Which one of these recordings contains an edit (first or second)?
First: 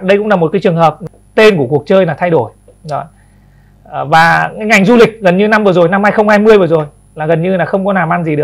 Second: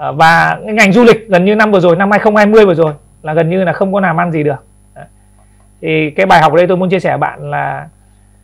first